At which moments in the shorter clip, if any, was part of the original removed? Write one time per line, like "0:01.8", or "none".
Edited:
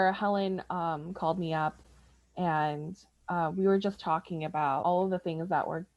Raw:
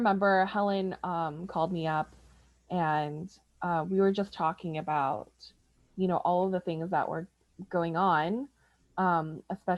0:04.8